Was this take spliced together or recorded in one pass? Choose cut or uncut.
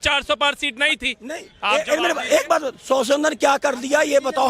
uncut